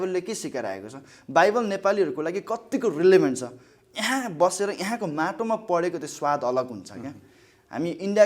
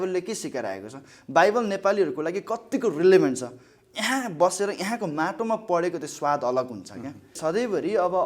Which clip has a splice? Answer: second; 1 cut; at 7.3 s

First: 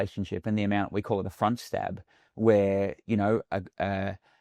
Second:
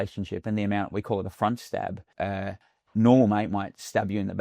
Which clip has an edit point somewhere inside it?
second; 1 cut; at 2.4 s

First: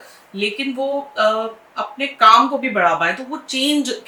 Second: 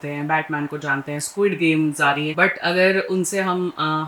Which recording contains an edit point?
second; 1 cut; at 2.3 s

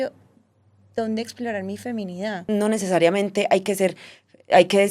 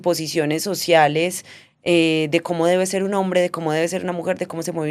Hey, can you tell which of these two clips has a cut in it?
first; 1 cut; at 2.5 s

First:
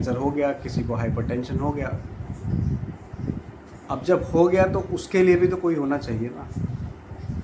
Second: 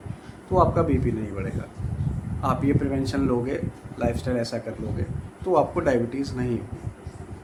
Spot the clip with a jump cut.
first; 1 cut; at 5.0 s

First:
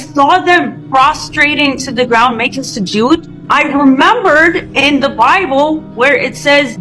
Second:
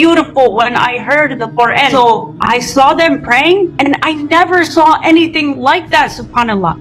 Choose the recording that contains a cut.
second; 1 cut; at 1.9 s

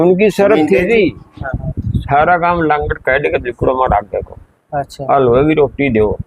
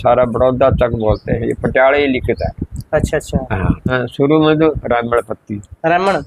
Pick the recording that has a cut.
second; 1 cut; at 3.9 s

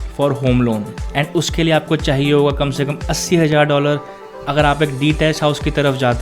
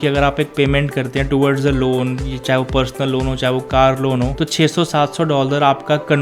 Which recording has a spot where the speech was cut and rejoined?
first; 1 cut; at 0.9 s

